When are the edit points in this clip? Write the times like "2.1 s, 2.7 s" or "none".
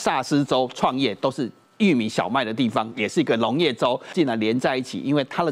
4.1 s